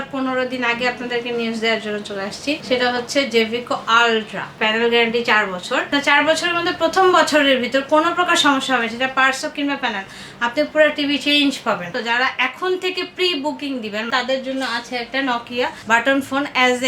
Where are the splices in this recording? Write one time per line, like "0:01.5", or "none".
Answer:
0:02.6
0:04.5
0:05.9
0:12.0
0:14.1
0:15.8